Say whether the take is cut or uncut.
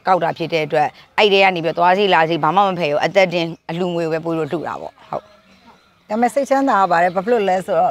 uncut